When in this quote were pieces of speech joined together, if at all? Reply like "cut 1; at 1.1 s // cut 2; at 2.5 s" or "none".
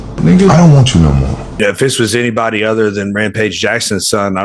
cut 1; at 1.4 s